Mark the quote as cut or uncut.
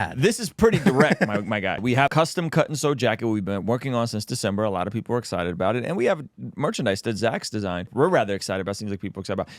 cut